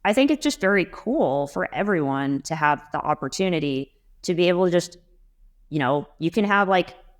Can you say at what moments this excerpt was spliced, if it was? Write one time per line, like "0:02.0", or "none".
none